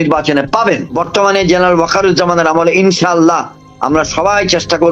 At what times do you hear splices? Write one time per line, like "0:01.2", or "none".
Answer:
0:01.0